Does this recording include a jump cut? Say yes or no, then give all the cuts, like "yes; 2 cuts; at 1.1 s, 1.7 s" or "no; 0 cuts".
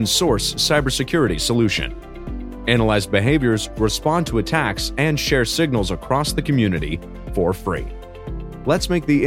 no; 0 cuts